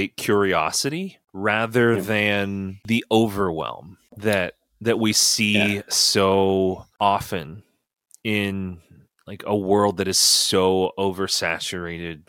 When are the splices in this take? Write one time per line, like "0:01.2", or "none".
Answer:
none